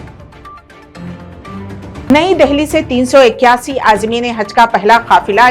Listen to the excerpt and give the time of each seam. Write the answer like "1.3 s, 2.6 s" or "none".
2.1 s